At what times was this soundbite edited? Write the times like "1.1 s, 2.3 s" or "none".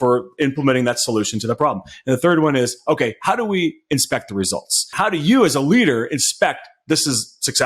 4.9 s